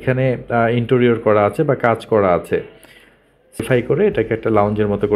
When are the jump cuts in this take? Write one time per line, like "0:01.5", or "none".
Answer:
0:03.6

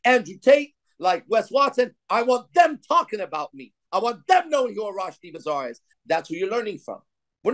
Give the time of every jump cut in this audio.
none

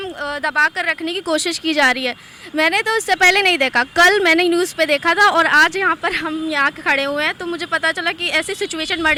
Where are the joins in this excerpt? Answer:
none

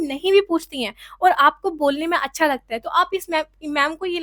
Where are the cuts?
none

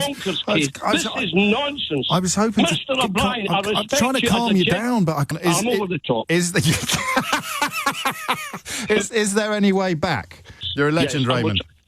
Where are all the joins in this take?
0:05.3
0:10.6

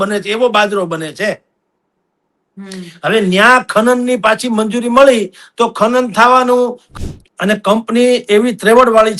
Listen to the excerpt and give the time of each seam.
0:06.8

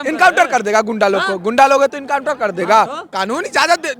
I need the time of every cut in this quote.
none

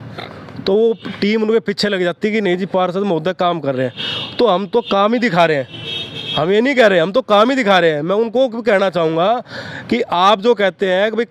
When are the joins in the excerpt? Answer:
none

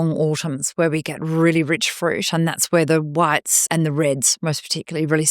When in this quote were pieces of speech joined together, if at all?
0:03.6

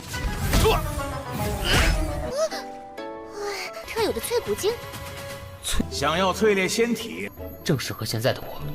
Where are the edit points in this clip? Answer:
0:02.2

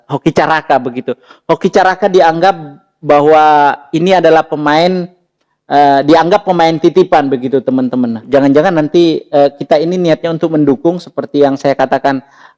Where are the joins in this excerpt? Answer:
0:08.2

